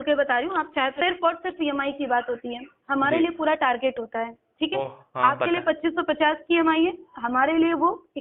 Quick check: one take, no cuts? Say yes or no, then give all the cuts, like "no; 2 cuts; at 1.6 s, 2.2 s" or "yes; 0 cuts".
no; 1 cut; at 1.0 s